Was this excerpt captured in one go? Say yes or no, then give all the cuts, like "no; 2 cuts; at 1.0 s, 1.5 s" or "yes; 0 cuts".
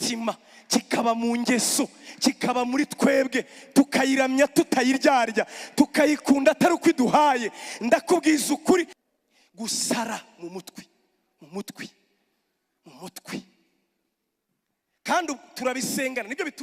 no; 1 cut; at 9.0 s